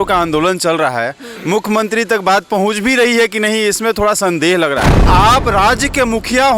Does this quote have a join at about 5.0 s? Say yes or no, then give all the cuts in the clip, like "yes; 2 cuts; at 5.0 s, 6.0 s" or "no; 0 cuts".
yes; 1 cut; at 5.0 s